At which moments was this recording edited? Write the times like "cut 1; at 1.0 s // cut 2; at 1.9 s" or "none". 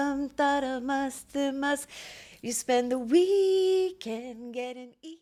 none